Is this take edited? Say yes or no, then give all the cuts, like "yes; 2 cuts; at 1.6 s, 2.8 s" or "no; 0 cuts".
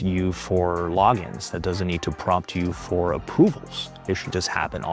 no; 0 cuts